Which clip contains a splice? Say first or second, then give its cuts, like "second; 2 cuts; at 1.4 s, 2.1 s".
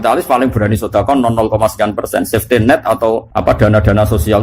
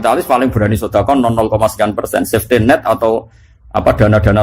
first; 1 cut; at 3.3 s